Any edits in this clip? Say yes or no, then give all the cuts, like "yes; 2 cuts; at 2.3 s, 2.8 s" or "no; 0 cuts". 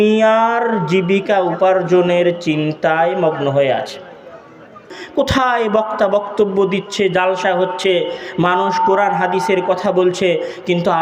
yes; 1 cut; at 5.0 s